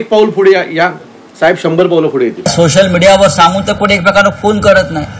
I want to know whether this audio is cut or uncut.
cut